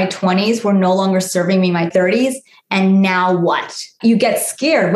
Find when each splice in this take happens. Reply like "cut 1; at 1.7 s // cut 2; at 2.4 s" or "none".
cut 1; at 1.9 s // cut 2; at 3.8 s